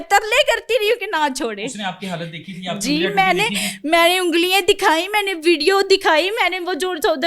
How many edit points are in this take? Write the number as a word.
zero